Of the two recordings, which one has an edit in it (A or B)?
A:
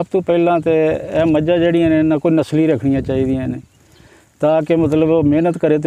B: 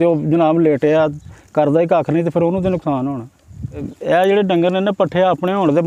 B